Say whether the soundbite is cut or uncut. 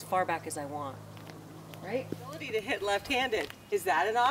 cut